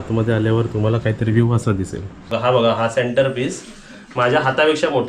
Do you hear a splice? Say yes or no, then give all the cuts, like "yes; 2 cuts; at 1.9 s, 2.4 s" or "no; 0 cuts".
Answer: yes; 1 cut; at 2.3 s